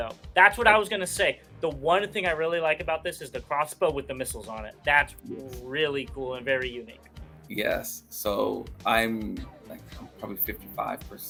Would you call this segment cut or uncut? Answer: uncut